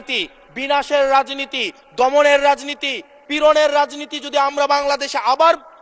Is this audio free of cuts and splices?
yes; 0 cuts

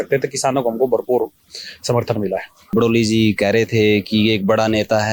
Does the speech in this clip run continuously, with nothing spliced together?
no; 1 cut; at 2.7 s

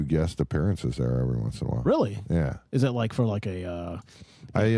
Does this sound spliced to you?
no; 0 cuts

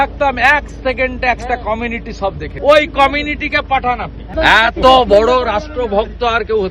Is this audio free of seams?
no; 2 cuts; at 2.5 s, 4.3 s

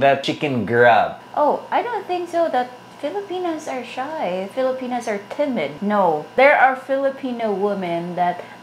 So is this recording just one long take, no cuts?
no; 2 cuts; at 1.2 s, 6.3 s

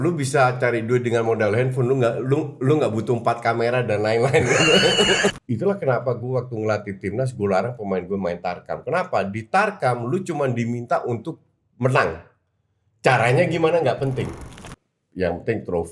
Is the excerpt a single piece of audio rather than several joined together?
no; 2 cuts; at 5.4 s, 14.6 s

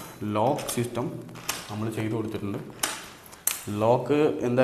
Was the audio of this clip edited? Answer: no; 0 cuts

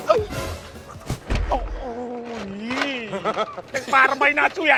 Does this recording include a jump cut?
no; 0 cuts

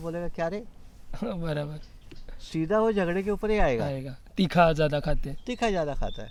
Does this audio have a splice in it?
no; 0 cuts

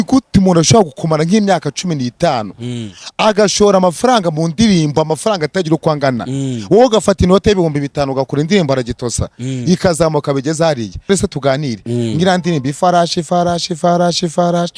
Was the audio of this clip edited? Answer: yes; 1 cut; at 11.1 s

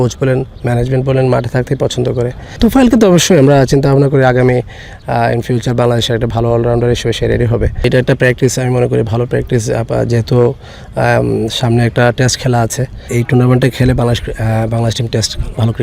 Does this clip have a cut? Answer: yes; 3 cuts; at 2.6 s, 7.8 s, 13.1 s

